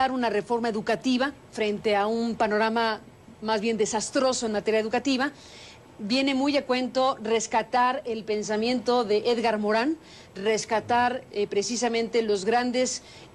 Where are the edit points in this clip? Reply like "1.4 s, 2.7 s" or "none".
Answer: 10.3 s